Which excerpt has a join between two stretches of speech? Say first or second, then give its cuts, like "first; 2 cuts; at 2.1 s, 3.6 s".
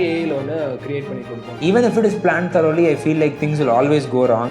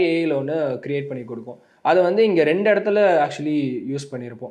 first; 1 cut; at 1.5 s